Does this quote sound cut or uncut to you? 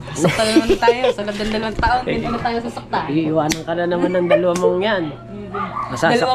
uncut